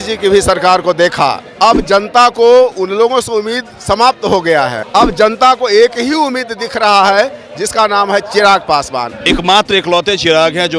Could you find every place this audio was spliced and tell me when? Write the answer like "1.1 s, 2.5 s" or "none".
1.4 s, 4.8 s, 9.2 s

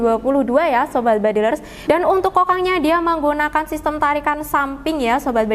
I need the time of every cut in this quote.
1.7 s

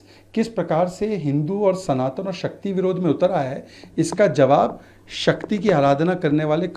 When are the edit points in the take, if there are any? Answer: none

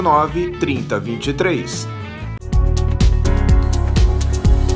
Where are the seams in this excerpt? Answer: 2.4 s

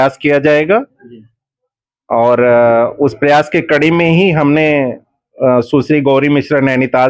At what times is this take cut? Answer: none

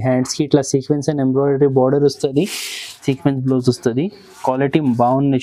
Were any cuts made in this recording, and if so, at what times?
3.0 s

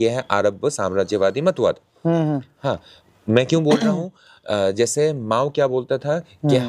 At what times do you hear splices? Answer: none

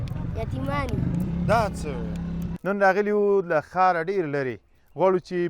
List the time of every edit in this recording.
2.5 s

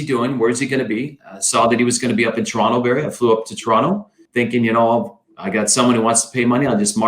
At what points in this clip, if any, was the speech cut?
4.2 s

